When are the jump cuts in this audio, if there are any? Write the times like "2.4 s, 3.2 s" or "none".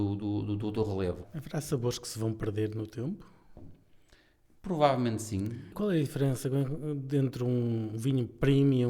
1.3 s, 5.8 s